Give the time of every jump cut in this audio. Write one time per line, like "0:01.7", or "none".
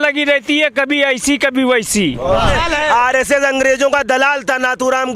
0:02.5